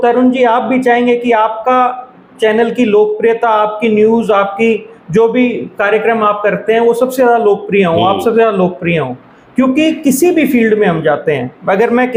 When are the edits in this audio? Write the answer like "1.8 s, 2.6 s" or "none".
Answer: none